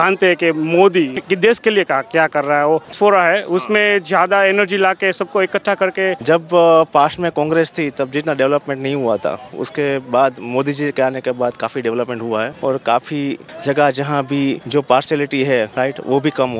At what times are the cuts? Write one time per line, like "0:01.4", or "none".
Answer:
0:01.2
0:02.9
0:06.2
0:12.5
0:13.5
0:14.6
0:15.7